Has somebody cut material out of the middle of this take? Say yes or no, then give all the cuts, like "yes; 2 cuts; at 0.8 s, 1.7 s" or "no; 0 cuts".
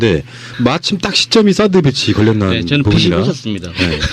yes; 1 cut; at 1.6 s